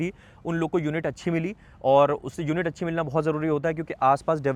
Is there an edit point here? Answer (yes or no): no